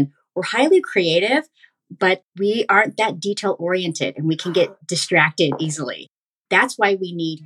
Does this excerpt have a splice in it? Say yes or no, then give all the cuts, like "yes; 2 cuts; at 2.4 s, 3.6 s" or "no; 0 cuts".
yes; 1 cut; at 6.3 s